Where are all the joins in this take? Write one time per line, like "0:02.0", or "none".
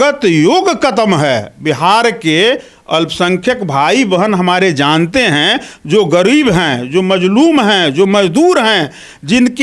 none

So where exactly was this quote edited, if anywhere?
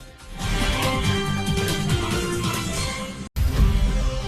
0:03.3

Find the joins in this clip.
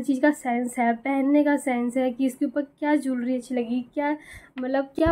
none

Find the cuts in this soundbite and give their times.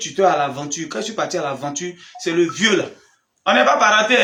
none

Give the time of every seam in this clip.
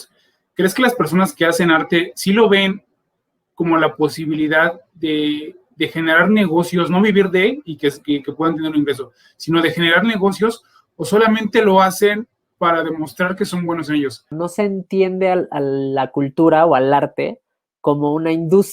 0:14.4

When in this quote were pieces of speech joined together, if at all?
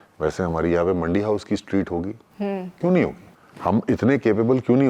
none

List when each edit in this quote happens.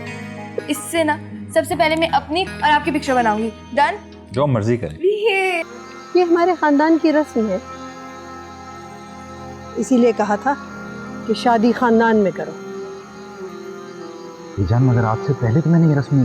0:05.7

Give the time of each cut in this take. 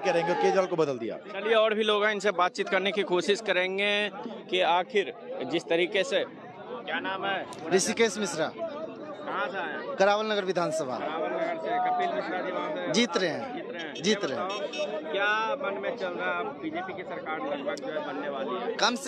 none

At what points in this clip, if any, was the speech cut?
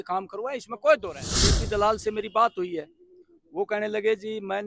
0:01.6

